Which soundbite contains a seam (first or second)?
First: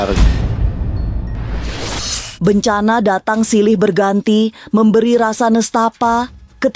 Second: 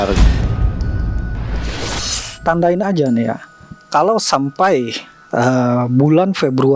second